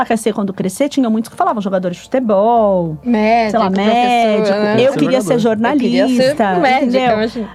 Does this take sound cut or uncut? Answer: uncut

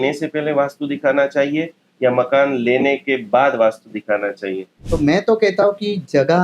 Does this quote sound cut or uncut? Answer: cut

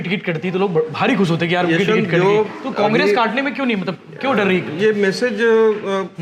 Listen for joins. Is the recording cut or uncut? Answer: uncut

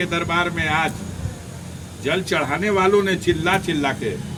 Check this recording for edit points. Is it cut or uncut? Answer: uncut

